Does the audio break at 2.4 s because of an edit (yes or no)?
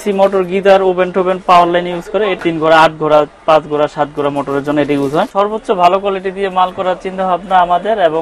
yes